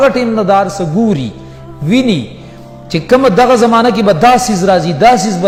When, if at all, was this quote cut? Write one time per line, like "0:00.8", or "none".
none